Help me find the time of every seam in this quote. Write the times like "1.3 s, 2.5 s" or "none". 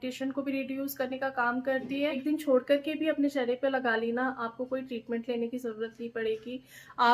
2.2 s